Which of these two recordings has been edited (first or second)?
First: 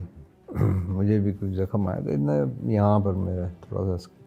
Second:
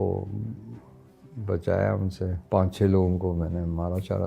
second